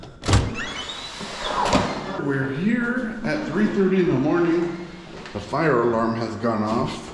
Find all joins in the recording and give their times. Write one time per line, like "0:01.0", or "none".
0:02.2